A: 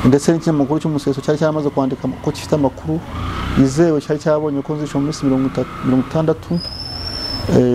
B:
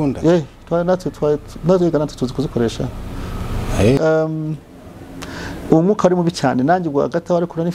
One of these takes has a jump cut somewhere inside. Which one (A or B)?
B